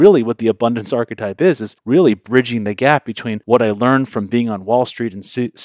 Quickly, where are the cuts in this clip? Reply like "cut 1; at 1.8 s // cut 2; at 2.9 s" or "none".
cut 1; at 1.7 s // cut 2; at 3.3 s